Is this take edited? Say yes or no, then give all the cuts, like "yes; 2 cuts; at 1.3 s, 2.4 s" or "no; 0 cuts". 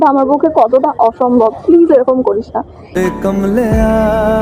yes; 1 cut; at 2.8 s